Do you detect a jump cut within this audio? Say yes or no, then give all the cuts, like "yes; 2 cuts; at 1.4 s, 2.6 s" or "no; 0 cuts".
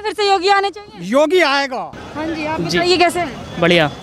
no; 0 cuts